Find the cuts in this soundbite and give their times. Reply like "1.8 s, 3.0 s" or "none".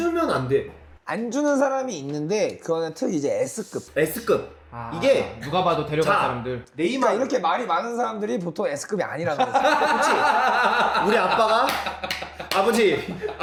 none